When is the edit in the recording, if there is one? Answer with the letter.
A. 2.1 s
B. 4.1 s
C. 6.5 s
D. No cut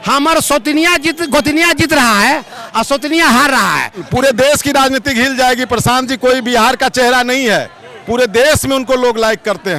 B